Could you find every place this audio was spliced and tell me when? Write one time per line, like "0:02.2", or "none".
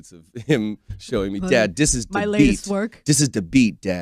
0:03.0